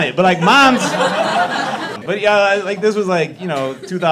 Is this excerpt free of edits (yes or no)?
no